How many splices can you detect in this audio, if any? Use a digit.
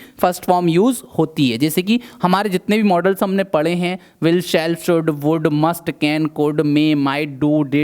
0